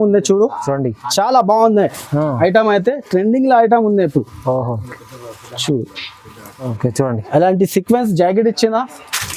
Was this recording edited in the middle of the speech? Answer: yes; 1 cut; at 6.7 s

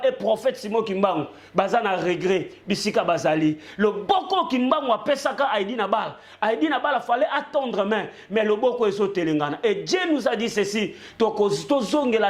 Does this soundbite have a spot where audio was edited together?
no; 0 cuts

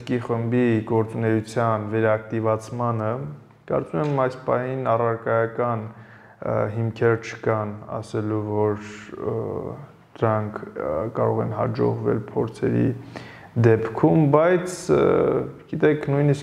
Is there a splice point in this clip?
no; 0 cuts

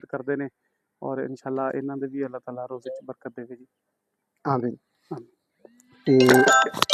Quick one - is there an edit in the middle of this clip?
no; 0 cuts

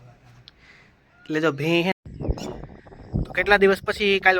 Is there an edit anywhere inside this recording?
yes; 1 cut; at 1.9 s

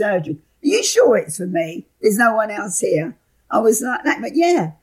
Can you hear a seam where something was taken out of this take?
no; 0 cuts

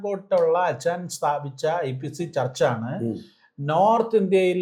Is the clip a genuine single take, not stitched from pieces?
yes; 0 cuts

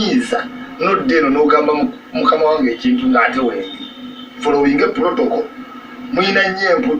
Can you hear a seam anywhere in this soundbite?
no; 0 cuts

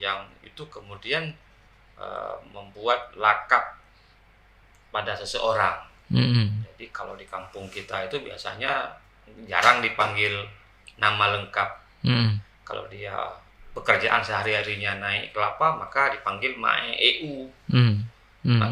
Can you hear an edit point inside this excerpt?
yes; 1 cut; at 13.5 s

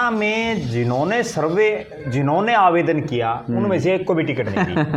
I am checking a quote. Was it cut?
no; 0 cuts

